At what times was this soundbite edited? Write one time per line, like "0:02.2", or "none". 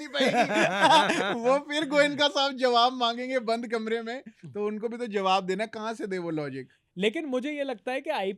none

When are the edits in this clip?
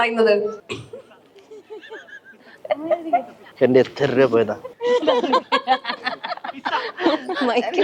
0:02.5

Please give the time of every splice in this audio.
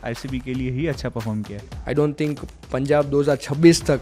0:01.6

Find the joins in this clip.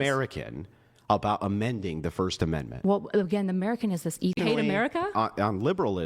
0:04.4

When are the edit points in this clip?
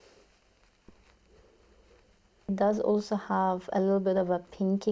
0:00.9
0:02.5

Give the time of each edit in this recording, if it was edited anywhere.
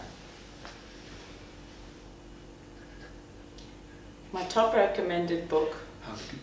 none

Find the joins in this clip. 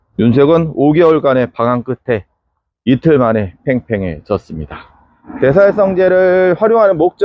none

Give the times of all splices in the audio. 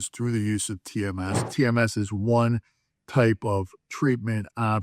0:01.5

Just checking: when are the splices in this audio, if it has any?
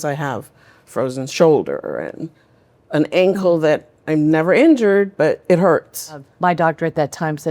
0:06.3

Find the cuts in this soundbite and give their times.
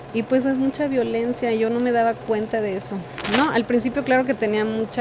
0:03.1

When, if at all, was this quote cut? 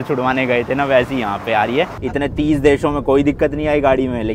0:02.0

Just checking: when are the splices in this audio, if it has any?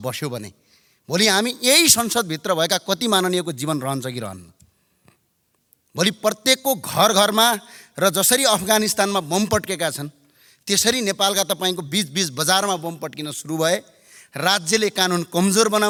none

